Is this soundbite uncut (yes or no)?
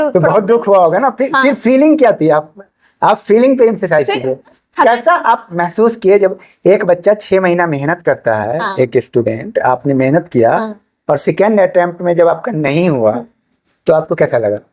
yes